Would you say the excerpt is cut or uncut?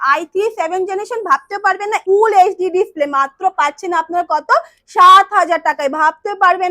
cut